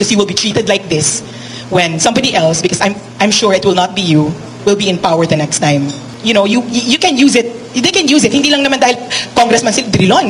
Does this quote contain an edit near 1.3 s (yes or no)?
no